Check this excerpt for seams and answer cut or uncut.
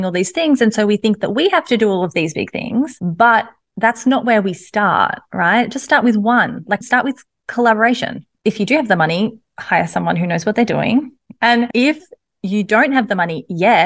cut